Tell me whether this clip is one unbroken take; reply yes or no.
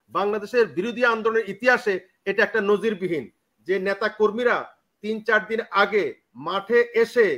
yes